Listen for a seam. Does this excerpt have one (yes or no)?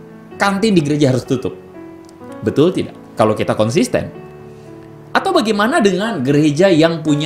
no